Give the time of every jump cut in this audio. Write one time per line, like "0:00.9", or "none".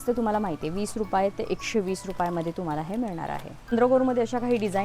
0:03.7